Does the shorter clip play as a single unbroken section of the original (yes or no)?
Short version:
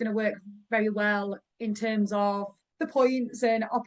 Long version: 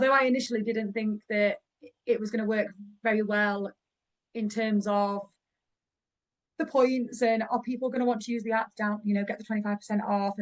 no